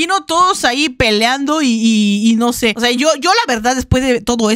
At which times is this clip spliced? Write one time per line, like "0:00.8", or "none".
none